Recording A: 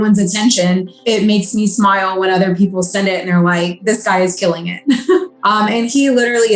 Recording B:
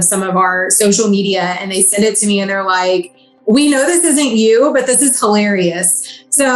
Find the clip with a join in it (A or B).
A